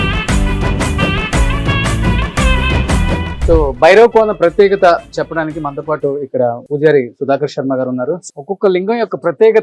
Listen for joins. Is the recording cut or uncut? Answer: cut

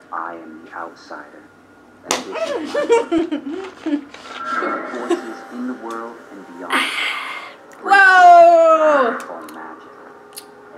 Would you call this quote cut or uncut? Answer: uncut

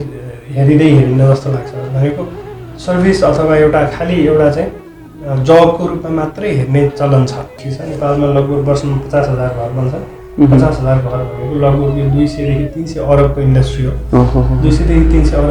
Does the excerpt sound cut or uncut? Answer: cut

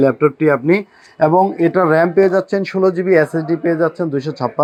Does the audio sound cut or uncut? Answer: uncut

